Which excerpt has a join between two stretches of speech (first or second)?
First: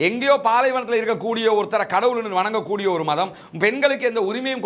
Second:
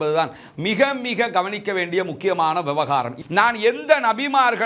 second